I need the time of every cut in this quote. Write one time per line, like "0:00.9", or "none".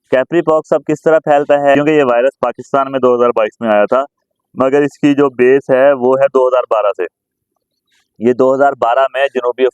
0:01.7